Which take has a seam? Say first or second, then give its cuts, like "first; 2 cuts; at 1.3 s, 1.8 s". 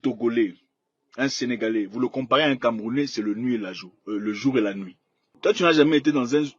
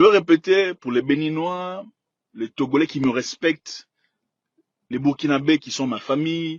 first; 1 cut; at 5.2 s